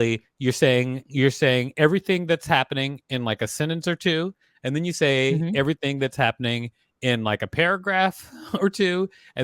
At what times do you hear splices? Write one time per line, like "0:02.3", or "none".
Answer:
0:01.0

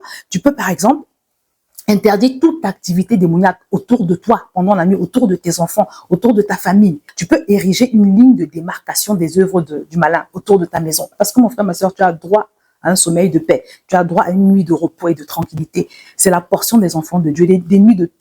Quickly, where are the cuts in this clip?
0:07.1
0:11.1

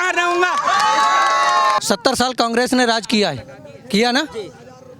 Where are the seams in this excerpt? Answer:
0:01.8

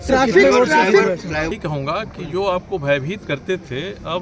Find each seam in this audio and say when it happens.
0:01.5

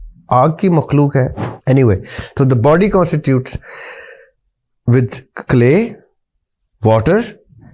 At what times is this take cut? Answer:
0:01.5

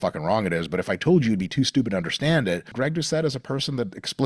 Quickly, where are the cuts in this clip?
0:02.7

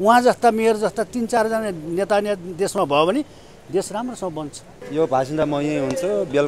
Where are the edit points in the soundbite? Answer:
0:04.7

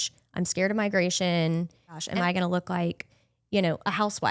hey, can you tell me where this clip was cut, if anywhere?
0:02.0

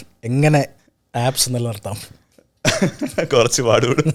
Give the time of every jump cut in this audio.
none

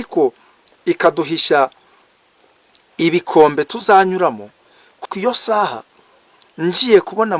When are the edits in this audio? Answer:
0:05.0

